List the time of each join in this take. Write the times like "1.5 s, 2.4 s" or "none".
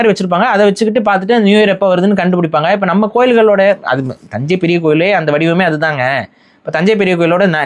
none